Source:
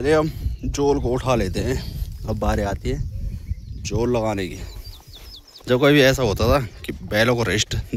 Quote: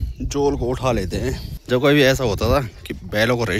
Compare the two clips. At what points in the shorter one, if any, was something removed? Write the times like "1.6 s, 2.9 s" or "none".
1.5 s